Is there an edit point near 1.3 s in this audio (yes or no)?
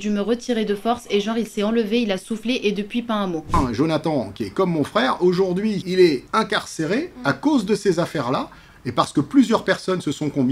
no